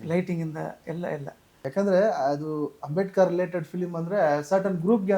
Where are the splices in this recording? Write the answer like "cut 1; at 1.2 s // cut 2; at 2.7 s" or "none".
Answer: cut 1; at 1.6 s

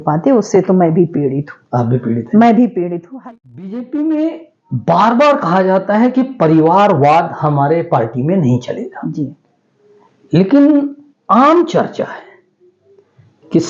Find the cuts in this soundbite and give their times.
cut 1; at 3.0 s

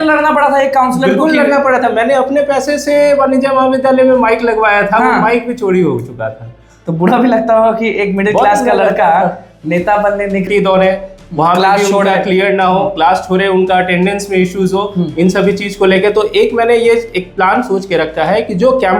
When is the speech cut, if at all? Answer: cut 1; at 10.5 s

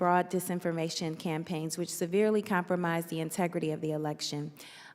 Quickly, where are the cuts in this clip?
none

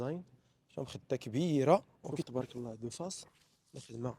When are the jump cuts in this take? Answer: cut 1; at 2.2 s

